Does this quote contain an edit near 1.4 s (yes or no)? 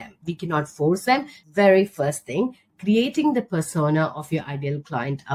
yes